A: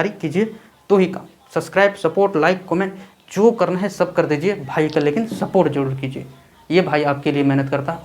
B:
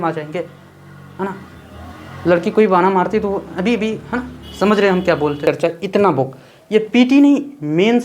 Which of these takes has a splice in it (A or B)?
B